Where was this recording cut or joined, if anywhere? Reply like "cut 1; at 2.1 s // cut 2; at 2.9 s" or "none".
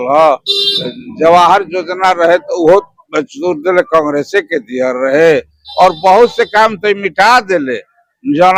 none